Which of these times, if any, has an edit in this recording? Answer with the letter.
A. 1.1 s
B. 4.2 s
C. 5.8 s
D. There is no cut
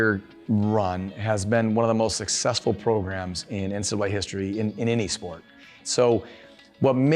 C